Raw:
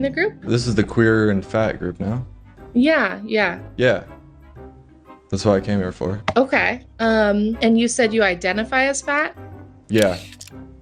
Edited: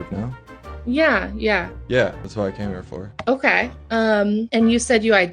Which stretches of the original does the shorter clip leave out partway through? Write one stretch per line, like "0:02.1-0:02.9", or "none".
0:04.1-0:05.3